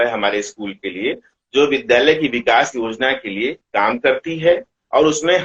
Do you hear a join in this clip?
no; 0 cuts

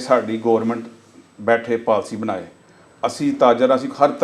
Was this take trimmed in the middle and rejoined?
no; 0 cuts

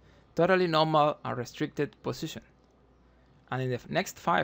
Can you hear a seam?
no; 0 cuts

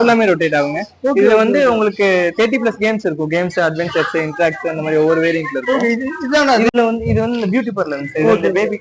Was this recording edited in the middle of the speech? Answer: yes; 1 cut; at 6.7 s

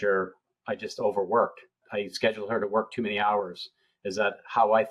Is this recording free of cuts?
no; 1 cut; at 1.8 s

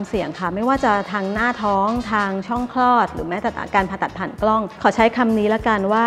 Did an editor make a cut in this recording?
no; 0 cuts

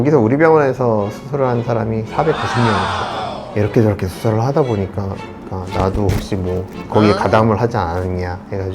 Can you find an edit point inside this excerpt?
yes; 2 cuts; at 3.4 s, 5.4 s

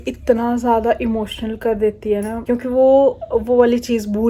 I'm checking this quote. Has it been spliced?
no; 0 cuts

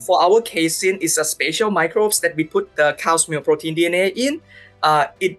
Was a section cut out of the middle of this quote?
no; 0 cuts

